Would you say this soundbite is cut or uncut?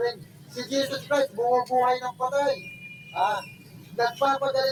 uncut